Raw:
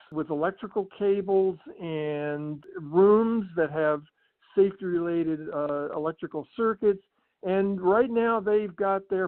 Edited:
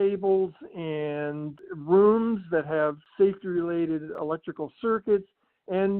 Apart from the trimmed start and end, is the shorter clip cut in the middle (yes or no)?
yes